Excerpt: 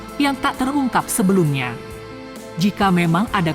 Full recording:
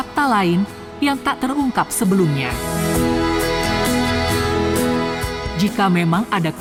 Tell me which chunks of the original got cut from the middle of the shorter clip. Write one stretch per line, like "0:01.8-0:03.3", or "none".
0:02.9-0:05.0